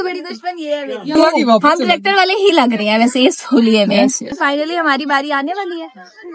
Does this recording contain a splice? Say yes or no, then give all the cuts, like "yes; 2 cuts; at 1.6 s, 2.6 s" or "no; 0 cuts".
yes; 2 cuts; at 1.2 s, 4.3 s